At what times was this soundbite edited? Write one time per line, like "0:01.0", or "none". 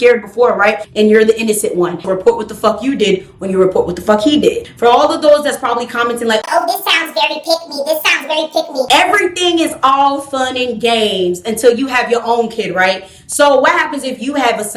0:00.8
0:02.0
0:04.6
0:08.9